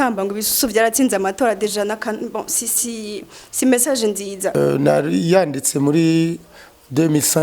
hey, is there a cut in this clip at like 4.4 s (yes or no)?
yes